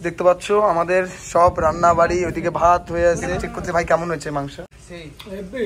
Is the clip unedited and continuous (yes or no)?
no